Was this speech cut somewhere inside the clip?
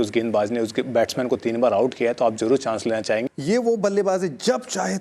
yes; 1 cut; at 3.2 s

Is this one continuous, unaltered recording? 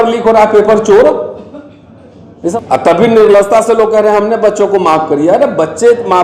no; 1 cut; at 2.5 s

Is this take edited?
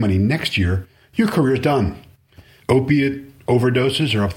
yes; 1 cut; at 2.5 s

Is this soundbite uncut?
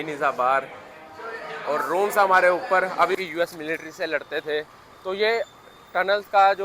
no; 1 cut; at 3.1 s

